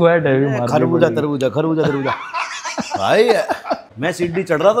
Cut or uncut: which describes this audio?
cut